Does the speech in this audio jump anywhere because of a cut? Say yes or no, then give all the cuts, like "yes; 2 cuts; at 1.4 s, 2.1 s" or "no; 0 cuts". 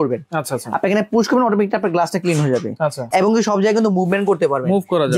yes; 1 cut; at 3.1 s